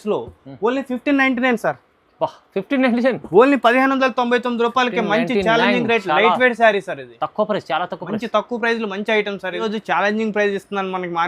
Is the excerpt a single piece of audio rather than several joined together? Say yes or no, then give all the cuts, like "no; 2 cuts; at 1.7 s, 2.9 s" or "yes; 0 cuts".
no; 1 cut; at 9.6 s